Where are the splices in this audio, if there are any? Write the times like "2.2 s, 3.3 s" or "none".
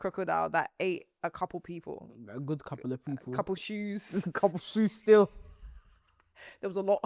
none